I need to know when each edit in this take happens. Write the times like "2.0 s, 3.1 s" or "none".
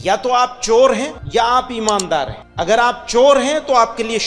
1.2 s, 2.4 s